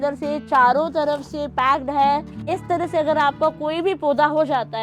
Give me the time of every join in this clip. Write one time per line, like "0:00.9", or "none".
0:02.4